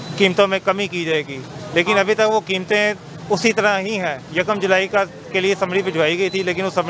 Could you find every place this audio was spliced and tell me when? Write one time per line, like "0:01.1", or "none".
none